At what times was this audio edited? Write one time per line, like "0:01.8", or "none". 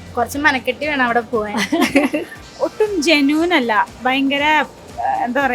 0:02.4